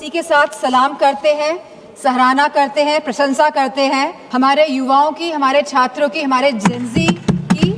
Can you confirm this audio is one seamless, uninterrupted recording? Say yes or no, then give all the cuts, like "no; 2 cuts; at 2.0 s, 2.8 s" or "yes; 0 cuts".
no; 1 cut; at 4.2 s